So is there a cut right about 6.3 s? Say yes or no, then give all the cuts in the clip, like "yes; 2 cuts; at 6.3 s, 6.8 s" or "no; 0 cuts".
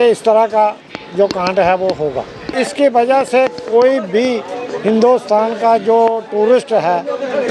no; 1 cut; at 2.4 s